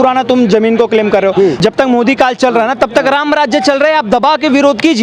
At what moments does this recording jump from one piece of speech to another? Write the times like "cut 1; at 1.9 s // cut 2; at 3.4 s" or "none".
cut 1; at 1.6 s